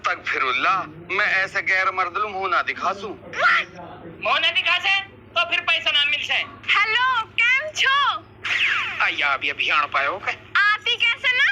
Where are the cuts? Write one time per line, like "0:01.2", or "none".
0:06.6

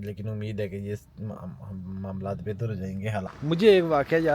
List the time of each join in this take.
0:03.3

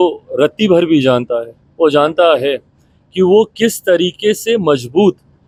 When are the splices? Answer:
none

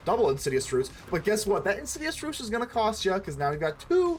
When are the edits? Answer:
none

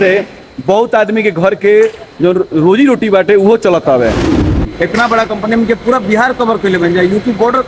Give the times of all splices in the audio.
0:04.5

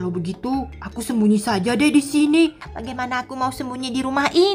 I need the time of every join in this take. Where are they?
0:02.7

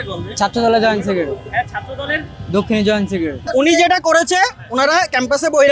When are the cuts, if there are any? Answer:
0:03.4

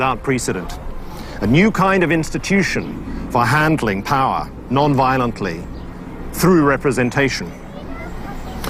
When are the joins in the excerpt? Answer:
0:01.8

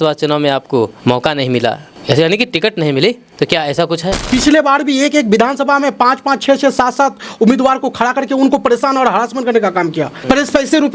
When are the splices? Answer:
0:01.0
0:01.9
0:03.3
0:04.2
0:10.1

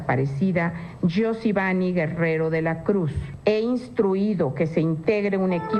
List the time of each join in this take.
0:01.6

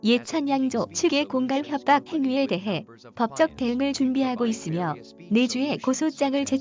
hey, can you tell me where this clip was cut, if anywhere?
0:01.0

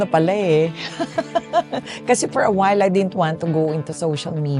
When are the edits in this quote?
none

